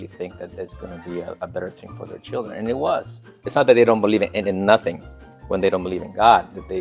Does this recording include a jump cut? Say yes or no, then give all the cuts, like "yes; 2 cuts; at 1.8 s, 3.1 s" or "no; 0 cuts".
yes; 1 cut; at 3.5 s